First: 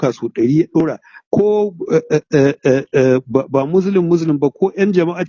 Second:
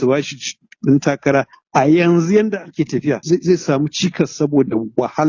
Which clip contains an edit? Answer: second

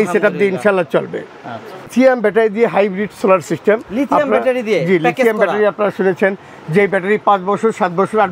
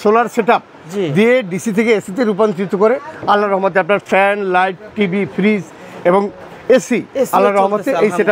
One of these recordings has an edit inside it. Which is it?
first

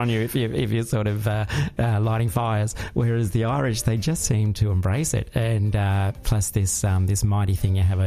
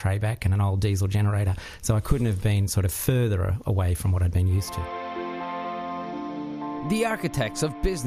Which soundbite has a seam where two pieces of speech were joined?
second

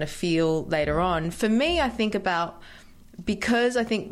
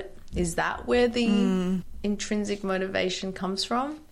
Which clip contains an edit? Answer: second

